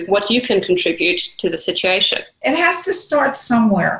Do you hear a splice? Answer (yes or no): yes